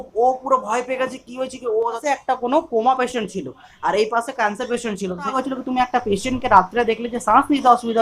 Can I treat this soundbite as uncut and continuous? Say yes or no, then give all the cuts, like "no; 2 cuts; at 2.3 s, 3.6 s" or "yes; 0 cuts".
no; 2 cuts; at 2.0 s, 5.3 s